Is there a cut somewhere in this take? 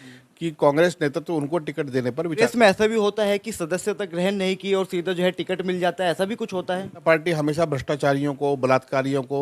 yes; 2 cuts; at 2.3 s, 7.0 s

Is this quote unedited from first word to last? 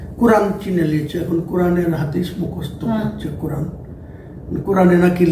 yes; 0 cuts

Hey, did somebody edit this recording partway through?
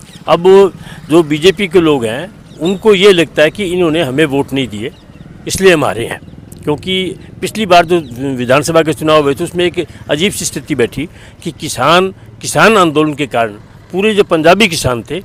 no; 0 cuts

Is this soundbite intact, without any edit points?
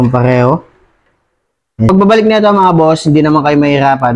no; 1 cut; at 1.9 s

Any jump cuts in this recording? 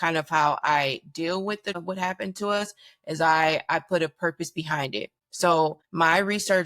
yes; 1 cut; at 5.6 s

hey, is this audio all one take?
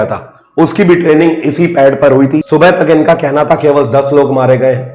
no; 1 cut; at 2.4 s

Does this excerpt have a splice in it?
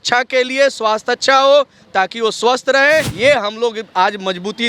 yes; 1 cut; at 3.1 s

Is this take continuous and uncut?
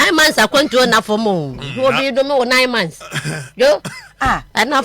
yes; 0 cuts

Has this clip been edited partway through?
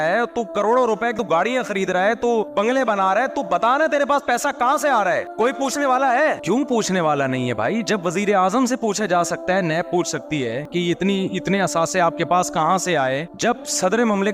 yes; 1 cut; at 6.4 s

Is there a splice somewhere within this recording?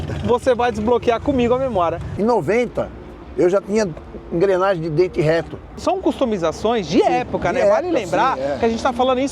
yes; 2 cuts; at 2.1 s, 5.8 s

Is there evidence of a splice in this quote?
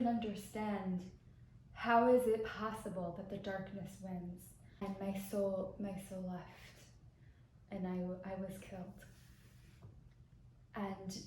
yes; 1 cut; at 4.8 s

